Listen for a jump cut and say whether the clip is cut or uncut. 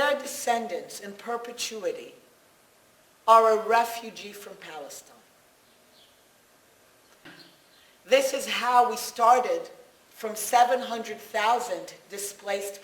cut